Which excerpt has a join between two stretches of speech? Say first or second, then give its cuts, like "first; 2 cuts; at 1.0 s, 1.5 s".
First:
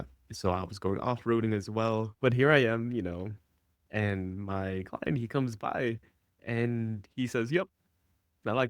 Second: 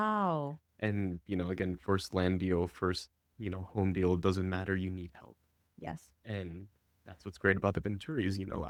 first; 1 cut; at 2.1 s